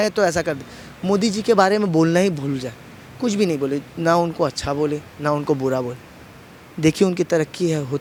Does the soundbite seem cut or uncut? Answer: uncut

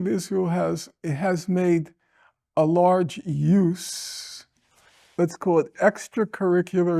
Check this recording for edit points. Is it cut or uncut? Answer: cut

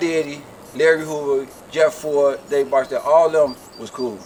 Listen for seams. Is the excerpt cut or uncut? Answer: uncut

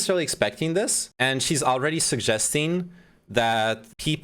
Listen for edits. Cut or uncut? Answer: cut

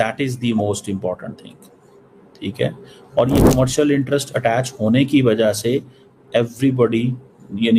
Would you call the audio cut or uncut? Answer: uncut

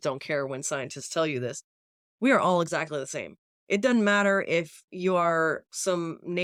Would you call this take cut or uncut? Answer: uncut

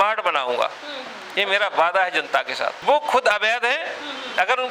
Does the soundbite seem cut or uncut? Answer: cut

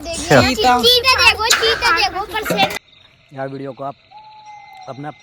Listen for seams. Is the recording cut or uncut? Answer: cut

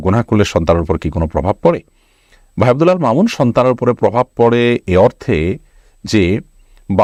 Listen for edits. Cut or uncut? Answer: uncut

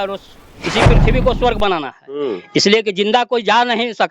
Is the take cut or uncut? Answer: uncut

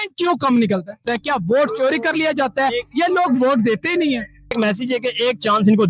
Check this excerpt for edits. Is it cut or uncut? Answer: cut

